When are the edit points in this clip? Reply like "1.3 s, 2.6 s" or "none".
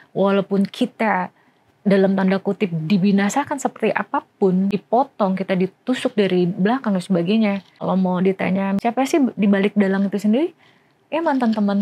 4.7 s, 7.7 s, 8.8 s